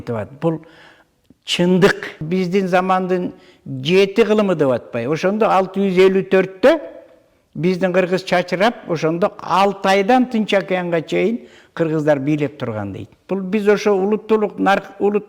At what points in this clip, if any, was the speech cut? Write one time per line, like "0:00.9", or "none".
0:02.2
0:13.1